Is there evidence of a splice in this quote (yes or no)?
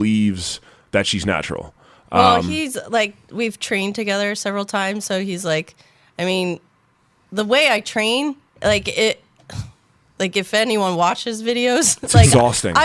no